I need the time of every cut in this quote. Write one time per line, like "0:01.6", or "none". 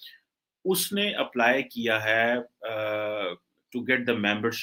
none

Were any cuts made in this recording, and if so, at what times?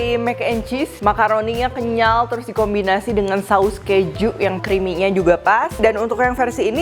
0:00.9
0:04.6
0:05.7

